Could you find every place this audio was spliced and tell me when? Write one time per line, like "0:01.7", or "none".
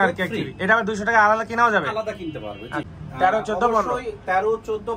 0:02.9